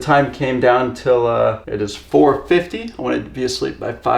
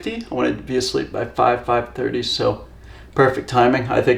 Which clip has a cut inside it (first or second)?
first